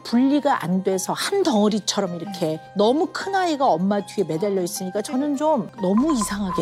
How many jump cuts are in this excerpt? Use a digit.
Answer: 1